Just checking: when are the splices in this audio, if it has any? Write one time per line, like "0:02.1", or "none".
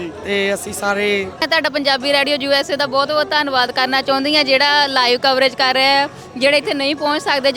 0:01.4